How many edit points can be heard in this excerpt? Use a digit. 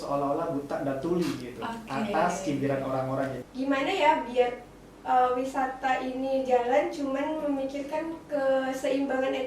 1